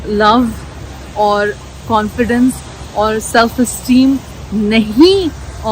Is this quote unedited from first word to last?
yes; 0 cuts

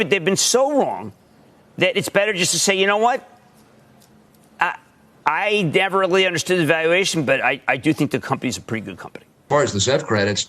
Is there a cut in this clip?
yes; 1 cut; at 9.4 s

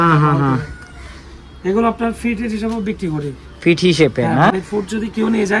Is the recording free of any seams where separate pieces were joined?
yes; 0 cuts

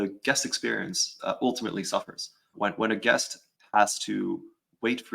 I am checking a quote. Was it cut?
yes; 2 cuts; at 2.5 s, 3.4 s

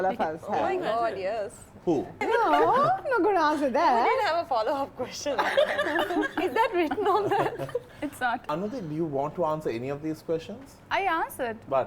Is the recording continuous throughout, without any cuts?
no; 2 cuts; at 2.2 s, 8.5 s

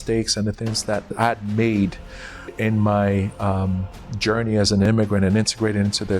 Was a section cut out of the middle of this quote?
yes; 3 cuts; at 1.1 s, 2.5 s, 4.9 s

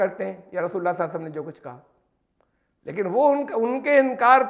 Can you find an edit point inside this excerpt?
no; 0 cuts

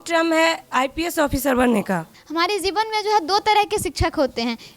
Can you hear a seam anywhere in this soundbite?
yes; 1 cut; at 2.2 s

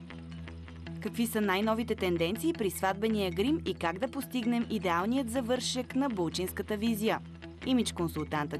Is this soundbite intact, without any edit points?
no; 1 cut; at 0.9 s

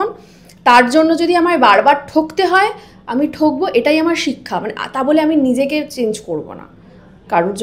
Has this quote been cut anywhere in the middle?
no; 0 cuts

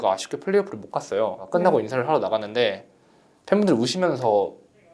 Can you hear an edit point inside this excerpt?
yes; 1 cut; at 1.4 s

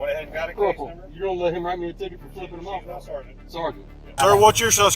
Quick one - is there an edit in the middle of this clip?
yes; 1 cut; at 4.0 s

